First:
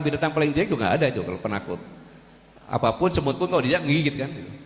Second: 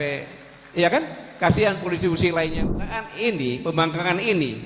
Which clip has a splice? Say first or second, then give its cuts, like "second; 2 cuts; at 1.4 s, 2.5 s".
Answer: second; 1 cut; at 2.7 s